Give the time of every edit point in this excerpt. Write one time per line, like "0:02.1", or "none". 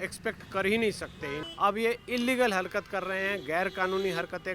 0:01.4